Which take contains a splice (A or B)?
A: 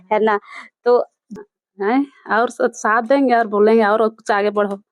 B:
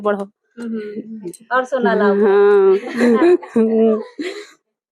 A